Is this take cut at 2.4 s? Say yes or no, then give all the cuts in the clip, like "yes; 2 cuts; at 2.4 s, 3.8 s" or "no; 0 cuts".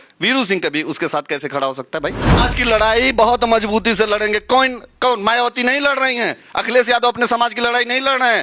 yes; 1 cut; at 2.4 s